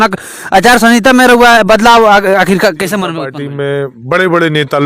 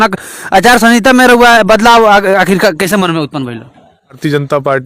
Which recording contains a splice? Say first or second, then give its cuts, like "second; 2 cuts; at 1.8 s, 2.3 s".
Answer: first; 1 cut; at 3.3 s